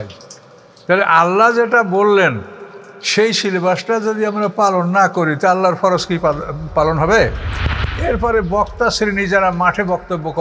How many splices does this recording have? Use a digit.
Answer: 1